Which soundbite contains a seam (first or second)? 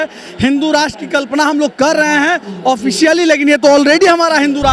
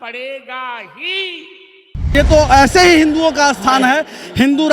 second